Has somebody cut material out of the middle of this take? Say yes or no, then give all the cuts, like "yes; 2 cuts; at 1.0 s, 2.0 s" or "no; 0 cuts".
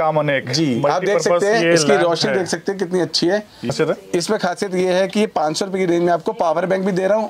yes; 1 cut; at 3.7 s